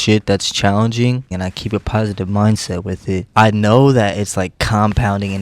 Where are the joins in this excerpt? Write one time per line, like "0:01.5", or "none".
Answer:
0:01.3